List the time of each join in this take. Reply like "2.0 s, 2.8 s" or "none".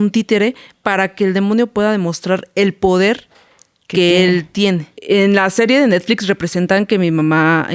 4.9 s

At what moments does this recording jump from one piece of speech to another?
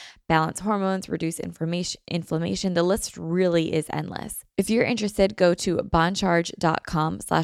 4.4 s

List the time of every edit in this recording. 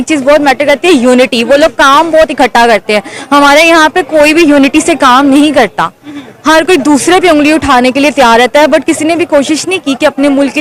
none

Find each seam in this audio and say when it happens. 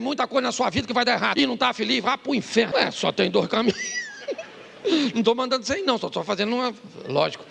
1.3 s, 2.7 s

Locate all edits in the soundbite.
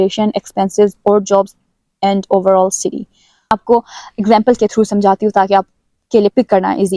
none

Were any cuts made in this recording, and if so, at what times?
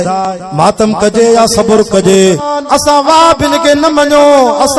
2.4 s

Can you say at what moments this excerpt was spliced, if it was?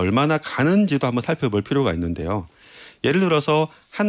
none

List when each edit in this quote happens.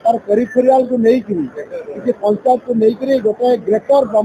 none

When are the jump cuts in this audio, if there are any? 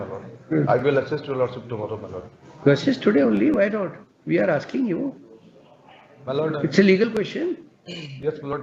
none

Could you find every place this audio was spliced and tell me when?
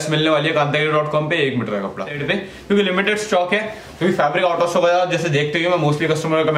2.1 s

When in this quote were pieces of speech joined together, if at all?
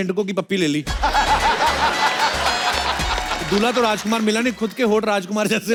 none

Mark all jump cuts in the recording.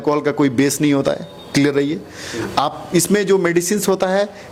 none

